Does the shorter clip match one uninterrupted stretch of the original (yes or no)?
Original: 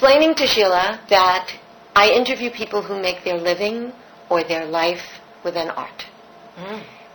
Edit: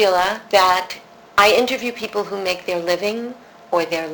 yes